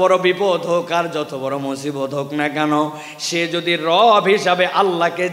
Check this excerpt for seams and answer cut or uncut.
uncut